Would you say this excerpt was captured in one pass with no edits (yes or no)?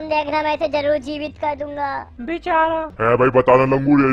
no